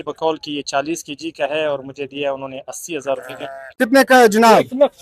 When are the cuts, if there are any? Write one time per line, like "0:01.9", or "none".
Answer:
0:03.7